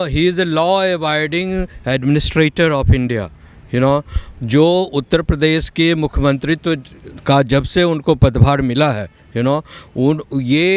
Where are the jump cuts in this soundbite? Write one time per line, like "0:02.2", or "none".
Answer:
none